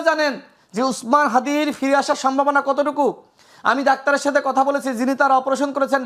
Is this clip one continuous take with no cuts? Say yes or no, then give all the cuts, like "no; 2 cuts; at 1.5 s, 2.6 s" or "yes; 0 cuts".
yes; 0 cuts